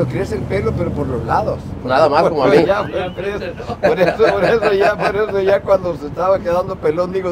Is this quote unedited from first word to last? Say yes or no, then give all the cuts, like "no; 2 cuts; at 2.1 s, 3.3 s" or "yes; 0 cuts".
yes; 0 cuts